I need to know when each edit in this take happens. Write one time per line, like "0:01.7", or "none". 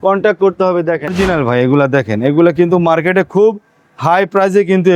0:01.1